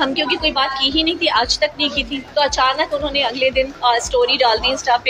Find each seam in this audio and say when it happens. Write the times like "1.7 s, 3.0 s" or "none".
2.2 s, 3.7 s